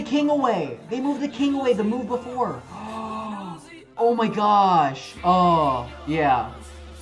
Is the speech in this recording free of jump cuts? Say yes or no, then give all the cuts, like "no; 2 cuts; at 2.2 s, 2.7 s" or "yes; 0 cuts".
yes; 0 cuts